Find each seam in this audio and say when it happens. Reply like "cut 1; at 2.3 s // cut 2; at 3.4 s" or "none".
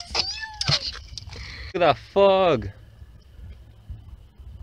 cut 1; at 1.7 s

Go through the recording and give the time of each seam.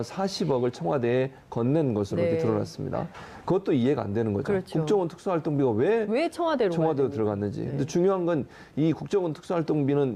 cut 1; at 4.4 s

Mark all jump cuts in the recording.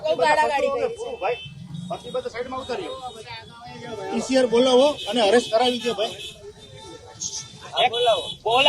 none

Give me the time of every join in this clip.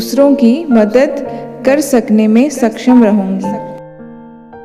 cut 1; at 3.6 s

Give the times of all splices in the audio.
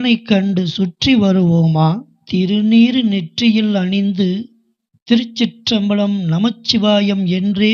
cut 1; at 2.1 s

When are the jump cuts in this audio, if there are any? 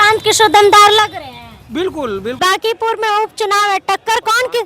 cut 1; at 2.4 s

